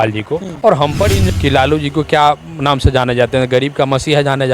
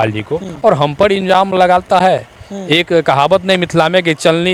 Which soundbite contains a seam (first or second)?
first